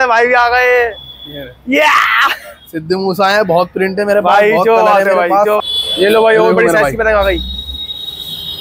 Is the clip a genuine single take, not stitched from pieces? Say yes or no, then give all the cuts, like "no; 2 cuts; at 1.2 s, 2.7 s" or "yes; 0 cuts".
no; 1 cut; at 5.6 s